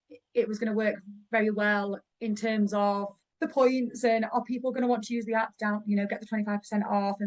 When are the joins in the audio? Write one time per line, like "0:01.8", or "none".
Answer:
0:02.1
0:03.2